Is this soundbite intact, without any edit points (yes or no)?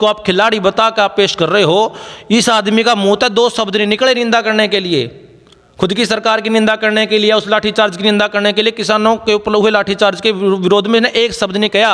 yes